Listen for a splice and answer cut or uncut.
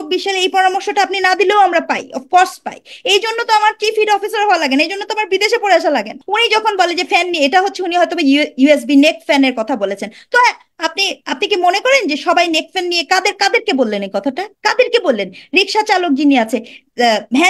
cut